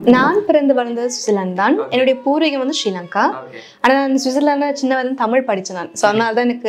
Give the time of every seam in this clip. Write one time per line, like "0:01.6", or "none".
none